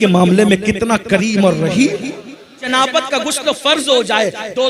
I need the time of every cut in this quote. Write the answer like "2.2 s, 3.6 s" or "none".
2.7 s